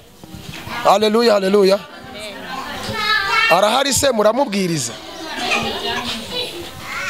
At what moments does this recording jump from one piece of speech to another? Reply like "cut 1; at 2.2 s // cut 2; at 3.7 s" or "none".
none